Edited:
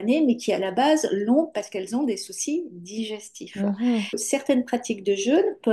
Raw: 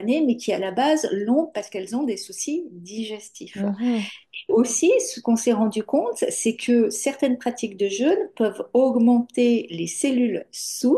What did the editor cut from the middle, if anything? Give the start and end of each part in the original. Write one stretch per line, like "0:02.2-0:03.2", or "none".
0:04.2-0:07.0